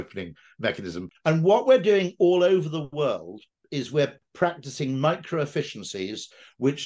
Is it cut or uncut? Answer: cut